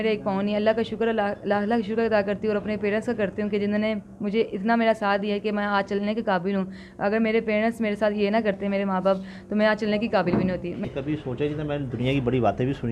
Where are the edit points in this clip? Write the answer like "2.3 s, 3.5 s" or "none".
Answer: 10.8 s